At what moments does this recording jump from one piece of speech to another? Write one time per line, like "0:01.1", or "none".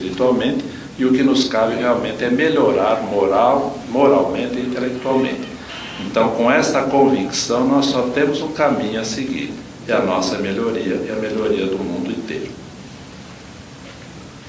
0:03.8